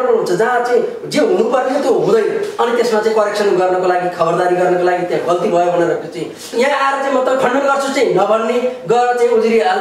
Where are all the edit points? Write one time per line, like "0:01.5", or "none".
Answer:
0:06.4